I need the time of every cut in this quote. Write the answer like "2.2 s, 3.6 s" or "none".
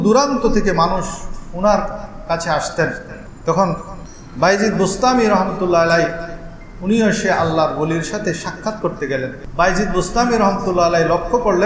9.4 s